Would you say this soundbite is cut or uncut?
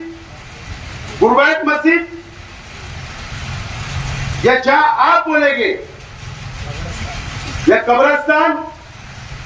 uncut